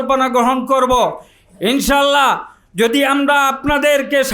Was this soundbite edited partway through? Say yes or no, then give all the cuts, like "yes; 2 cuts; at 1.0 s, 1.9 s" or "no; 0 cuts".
no; 0 cuts